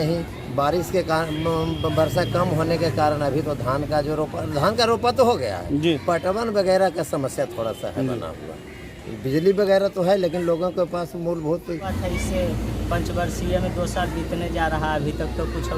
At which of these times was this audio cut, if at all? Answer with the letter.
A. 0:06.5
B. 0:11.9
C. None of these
B